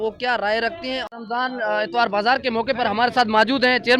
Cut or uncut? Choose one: cut